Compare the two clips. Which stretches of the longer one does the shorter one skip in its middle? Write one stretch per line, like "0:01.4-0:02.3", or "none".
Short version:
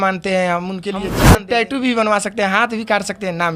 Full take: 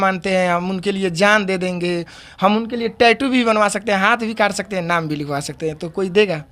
0:01.2-0:02.7